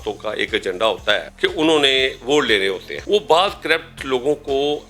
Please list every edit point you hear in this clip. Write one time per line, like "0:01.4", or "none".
0:01.3
0:02.9

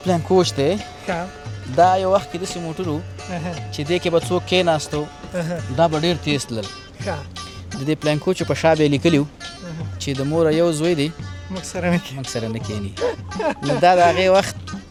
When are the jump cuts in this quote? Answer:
none

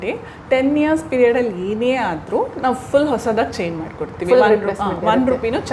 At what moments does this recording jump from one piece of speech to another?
none

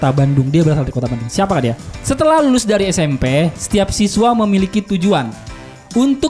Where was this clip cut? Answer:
0:02.0

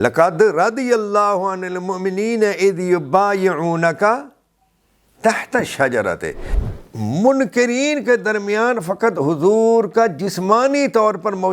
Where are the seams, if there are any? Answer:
0:06.5

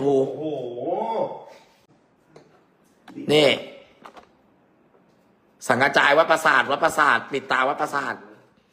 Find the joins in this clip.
0:01.8

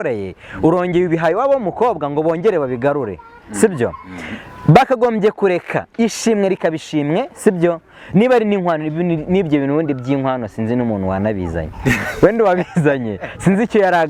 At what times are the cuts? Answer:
none

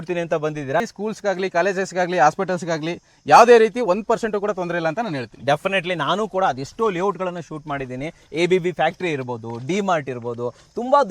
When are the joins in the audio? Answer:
0:00.9

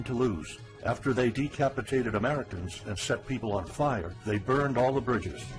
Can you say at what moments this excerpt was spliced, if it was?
none

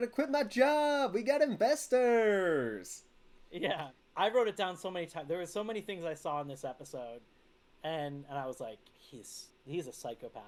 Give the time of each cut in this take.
none

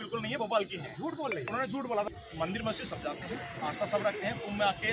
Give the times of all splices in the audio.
0:02.1

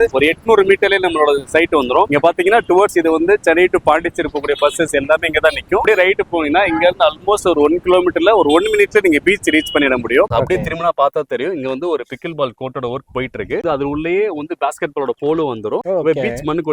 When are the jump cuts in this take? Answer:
0:02.1
0:05.8
0:10.3
0:13.6

